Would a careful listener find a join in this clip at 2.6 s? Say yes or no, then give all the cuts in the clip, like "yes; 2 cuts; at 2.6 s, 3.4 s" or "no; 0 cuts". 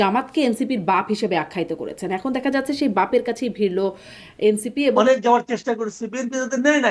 no; 1 cut; at 5.0 s